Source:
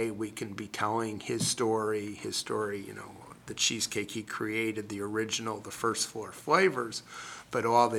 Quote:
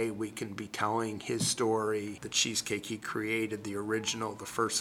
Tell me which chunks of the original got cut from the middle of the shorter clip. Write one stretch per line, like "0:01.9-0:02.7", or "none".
0:02.1-0:03.4